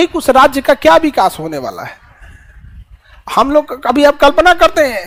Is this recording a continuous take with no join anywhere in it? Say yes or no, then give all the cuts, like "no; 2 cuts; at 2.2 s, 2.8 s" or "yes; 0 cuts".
yes; 0 cuts